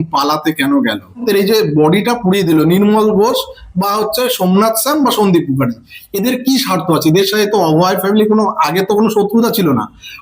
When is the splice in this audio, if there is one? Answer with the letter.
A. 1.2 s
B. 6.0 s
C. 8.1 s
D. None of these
A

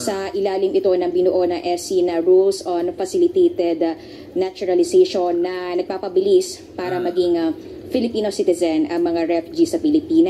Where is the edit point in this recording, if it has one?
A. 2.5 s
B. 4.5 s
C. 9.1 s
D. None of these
C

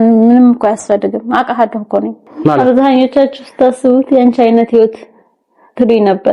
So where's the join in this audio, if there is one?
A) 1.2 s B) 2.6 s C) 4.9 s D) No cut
B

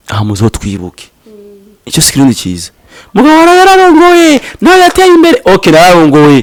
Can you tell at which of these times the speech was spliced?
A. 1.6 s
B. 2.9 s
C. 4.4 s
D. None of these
D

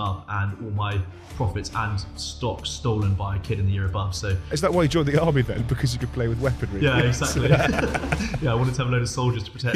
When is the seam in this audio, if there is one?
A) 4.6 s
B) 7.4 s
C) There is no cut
A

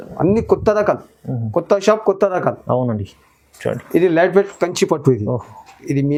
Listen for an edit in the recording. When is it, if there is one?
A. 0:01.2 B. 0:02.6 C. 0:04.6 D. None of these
D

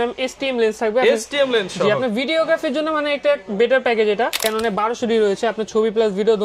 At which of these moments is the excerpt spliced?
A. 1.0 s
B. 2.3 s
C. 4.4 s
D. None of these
C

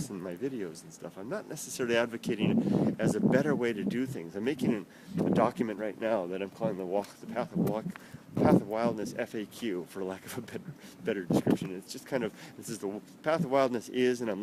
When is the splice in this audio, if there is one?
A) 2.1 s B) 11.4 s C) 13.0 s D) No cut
D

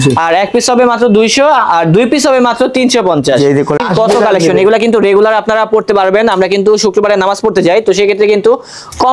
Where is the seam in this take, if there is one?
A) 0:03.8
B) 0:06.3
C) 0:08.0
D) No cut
A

